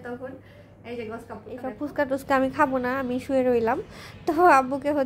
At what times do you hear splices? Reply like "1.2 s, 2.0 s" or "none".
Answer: 1.8 s